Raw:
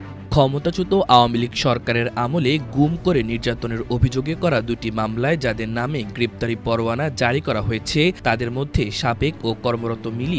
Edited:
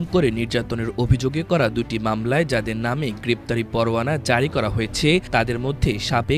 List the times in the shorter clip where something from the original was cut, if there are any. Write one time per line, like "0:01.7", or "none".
none